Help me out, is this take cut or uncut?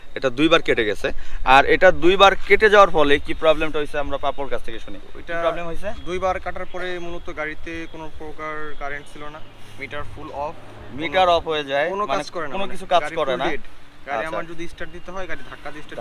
uncut